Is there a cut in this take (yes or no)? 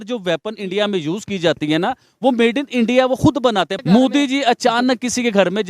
yes